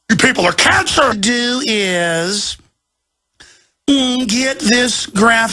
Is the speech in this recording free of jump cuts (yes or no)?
yes